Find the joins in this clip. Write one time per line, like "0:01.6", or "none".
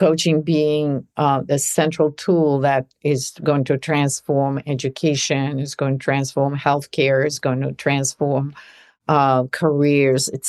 none